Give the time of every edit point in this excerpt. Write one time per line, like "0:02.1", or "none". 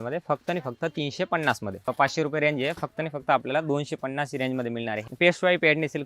0:01.9
0:05.0